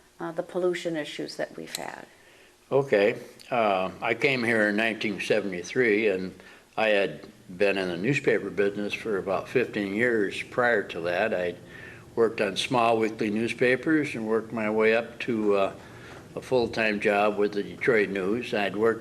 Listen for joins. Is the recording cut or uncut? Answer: cut